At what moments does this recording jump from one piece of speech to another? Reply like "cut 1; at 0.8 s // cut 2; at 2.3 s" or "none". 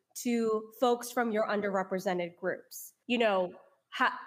none